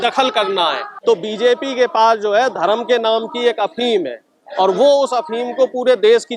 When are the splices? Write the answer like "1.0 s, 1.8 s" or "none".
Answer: 0.9 s